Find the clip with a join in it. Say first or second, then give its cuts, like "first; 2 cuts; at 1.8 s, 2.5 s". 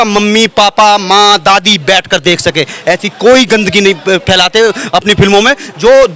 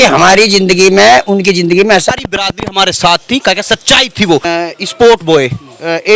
second; 2 cuts; at 2.1 s, 4.4 s